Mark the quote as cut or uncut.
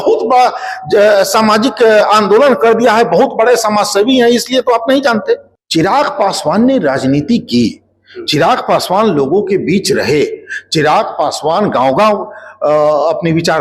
cut